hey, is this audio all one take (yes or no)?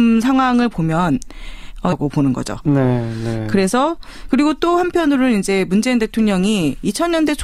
yes